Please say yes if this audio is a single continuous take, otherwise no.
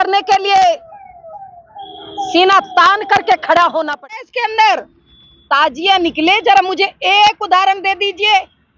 no